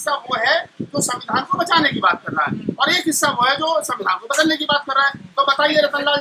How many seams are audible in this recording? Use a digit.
0